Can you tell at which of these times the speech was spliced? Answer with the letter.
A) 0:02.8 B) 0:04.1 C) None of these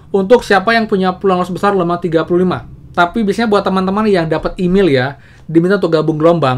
A